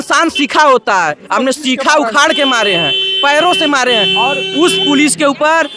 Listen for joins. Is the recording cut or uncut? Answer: uncut